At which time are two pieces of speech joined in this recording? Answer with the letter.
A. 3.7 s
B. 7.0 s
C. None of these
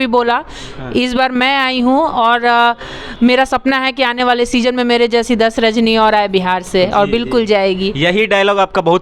C